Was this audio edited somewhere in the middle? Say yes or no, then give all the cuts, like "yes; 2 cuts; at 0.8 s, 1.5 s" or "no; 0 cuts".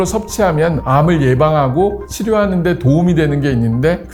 no; 0 cuts